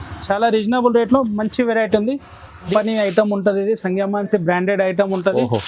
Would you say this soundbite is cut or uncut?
cut